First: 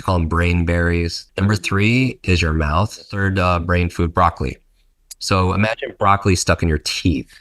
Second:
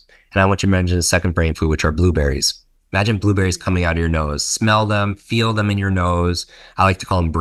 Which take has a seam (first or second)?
first